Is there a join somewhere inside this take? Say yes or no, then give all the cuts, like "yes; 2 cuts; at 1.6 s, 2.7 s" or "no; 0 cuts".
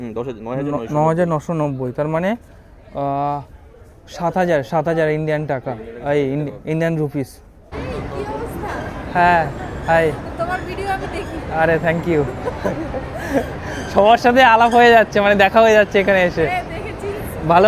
yes; 1 cut; at 7.7 s